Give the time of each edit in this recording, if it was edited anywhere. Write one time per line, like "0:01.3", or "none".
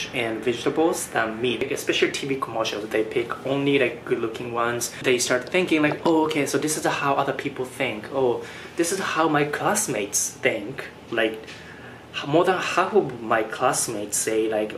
0:01.6
0:05.0